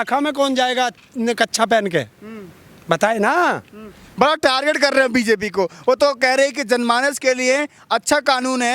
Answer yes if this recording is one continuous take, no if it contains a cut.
yes